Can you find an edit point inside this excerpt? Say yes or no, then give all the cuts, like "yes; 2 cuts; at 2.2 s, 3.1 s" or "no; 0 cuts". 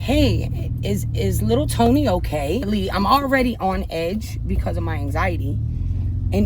yes; 1 cut; at 2.7 s